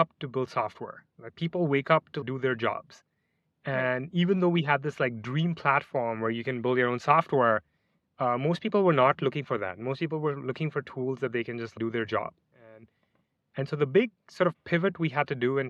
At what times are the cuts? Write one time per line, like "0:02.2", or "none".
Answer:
none

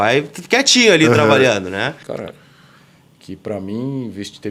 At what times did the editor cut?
0:02.0

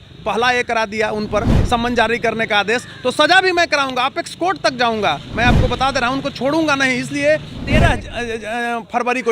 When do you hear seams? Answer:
0:07.5

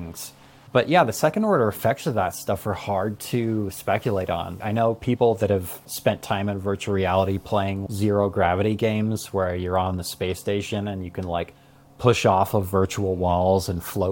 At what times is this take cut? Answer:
0:04.6
0:05.9
0:07.8

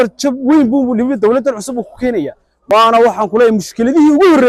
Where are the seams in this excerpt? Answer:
0:02.5

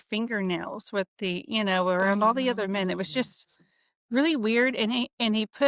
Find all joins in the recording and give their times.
none

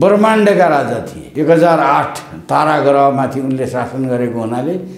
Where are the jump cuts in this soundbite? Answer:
0:01.2

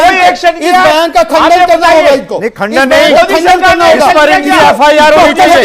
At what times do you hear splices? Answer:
0:04.2

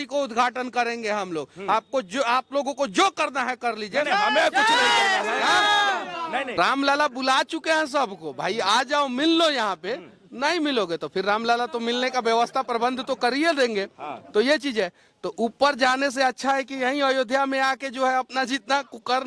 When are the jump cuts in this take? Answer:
0:06.5

